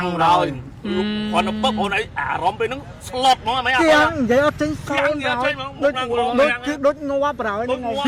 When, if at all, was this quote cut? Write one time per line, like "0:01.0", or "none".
none